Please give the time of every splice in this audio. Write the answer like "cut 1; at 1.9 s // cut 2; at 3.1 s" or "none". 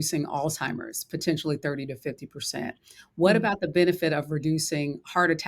none